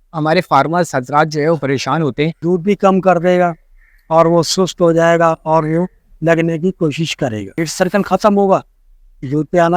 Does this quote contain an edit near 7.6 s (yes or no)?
yes